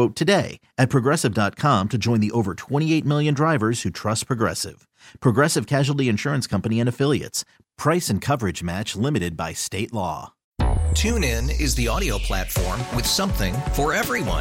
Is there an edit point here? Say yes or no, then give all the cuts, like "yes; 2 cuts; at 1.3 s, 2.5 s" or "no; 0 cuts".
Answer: yes; 1 cut; at 10.4 s